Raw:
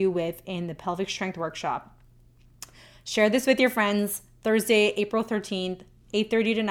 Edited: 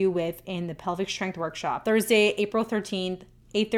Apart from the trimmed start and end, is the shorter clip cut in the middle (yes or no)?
yes